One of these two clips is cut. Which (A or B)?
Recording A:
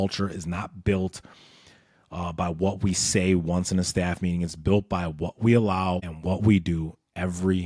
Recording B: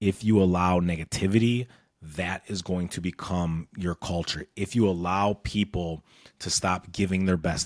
A